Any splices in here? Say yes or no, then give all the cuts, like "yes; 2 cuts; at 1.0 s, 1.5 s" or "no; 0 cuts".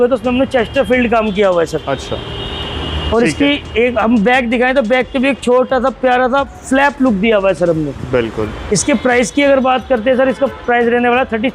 no; 0 cuts